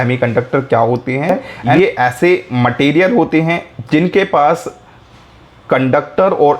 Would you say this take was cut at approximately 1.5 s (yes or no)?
yes